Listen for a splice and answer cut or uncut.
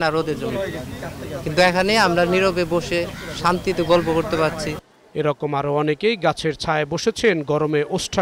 uncut